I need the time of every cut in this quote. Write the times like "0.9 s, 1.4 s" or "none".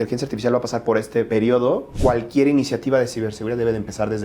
1.4 s